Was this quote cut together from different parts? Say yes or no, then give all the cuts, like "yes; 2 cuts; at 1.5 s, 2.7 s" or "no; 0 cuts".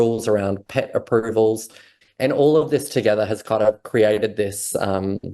yes; 1 cut; at 1.9 s